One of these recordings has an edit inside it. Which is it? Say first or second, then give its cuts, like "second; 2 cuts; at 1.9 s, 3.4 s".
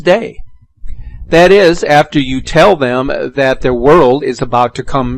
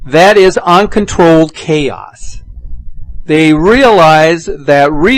first; 1 cut; at 3.2 s